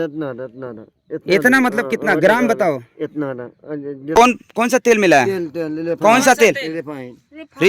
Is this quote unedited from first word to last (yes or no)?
no